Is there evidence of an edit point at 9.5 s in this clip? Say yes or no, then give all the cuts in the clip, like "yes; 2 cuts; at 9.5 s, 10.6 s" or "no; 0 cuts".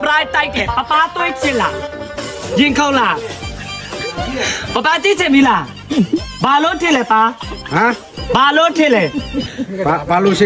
no; 0 cuts